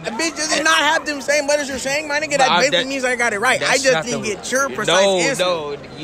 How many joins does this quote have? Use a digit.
0